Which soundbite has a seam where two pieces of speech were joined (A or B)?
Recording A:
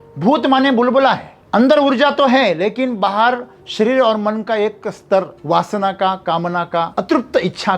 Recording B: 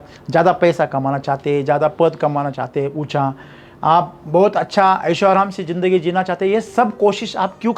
A